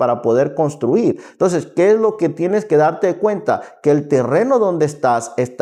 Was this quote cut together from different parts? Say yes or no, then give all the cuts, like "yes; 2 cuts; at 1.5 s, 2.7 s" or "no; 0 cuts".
no; 0 cuts